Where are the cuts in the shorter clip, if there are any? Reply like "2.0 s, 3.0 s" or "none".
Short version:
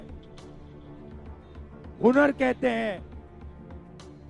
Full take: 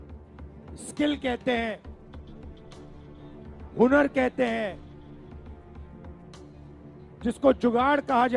3.0 s